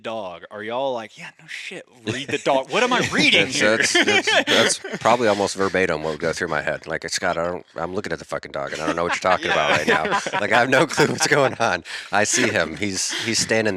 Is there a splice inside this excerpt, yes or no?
no